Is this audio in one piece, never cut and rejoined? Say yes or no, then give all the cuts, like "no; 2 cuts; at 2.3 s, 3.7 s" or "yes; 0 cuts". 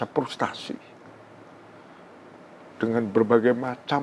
yes; 0 cuts